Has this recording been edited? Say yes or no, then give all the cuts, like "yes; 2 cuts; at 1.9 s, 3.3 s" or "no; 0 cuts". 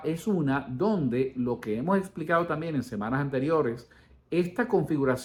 no; 0 cuts